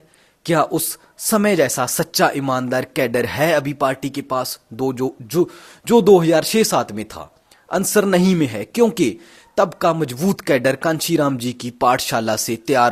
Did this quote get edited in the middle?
no; 0 cuts

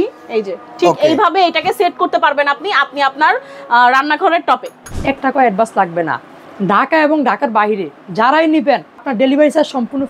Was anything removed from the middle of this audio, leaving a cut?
yes; 2 cuts; at 4.9 s, 9.1 s

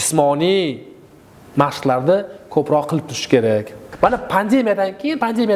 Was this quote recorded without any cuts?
no; 1 cut; at 3.8 s

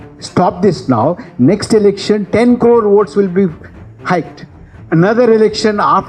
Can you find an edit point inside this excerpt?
no; 0 cuts

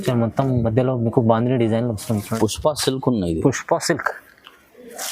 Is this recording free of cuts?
no; 1 cut; at 2.3 s

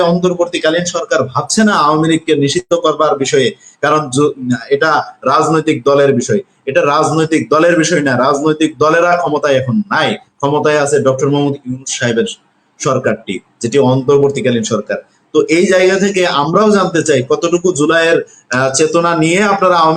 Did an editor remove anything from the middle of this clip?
no; 0 cuts

